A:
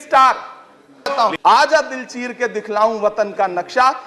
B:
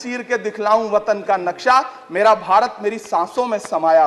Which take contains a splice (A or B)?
A